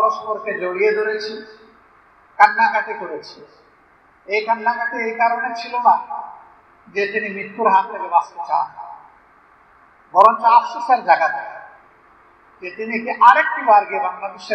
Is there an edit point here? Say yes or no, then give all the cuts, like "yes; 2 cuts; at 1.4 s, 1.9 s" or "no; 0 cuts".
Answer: no; 0 cuts